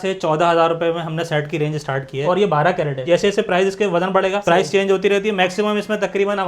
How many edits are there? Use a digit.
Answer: 2